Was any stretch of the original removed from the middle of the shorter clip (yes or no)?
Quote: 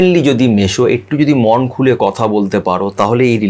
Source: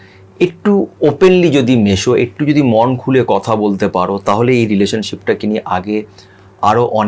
no